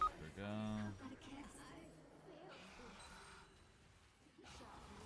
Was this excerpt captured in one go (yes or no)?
yes